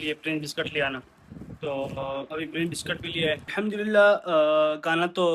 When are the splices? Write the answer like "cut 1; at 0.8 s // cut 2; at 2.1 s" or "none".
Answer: cut 1; at 3.5 s